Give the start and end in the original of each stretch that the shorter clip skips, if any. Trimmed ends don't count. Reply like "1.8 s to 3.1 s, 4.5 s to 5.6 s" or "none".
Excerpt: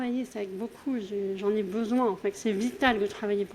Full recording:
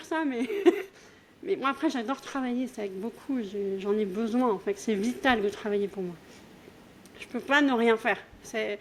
none